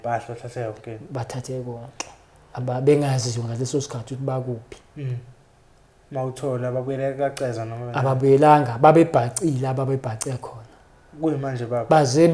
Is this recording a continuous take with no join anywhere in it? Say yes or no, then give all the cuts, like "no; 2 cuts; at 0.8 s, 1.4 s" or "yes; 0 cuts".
yes; 0 cuts